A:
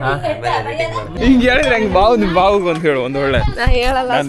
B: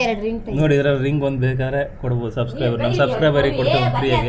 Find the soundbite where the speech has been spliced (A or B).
A